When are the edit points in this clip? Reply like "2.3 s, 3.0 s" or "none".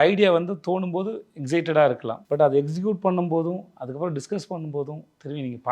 2.1 s